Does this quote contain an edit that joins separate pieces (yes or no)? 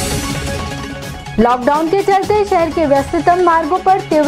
yes